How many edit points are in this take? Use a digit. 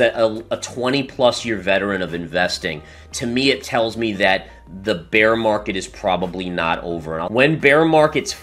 1